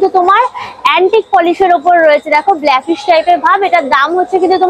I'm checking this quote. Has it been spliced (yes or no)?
no